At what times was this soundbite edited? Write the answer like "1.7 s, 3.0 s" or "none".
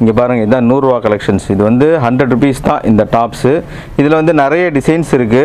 none

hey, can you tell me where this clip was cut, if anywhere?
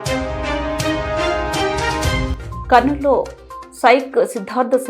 2.1 s

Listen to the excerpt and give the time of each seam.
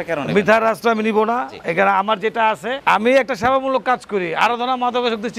2.8 s

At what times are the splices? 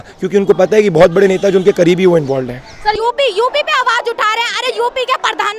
2.9 s

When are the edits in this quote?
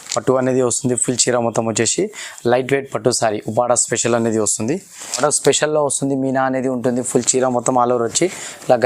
5.2 s

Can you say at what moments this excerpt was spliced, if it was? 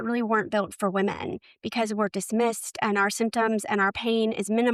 none

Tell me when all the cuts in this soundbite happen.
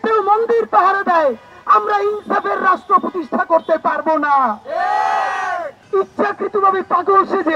5.7 s

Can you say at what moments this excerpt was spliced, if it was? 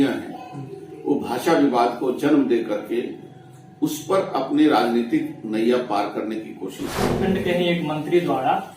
7.2 s

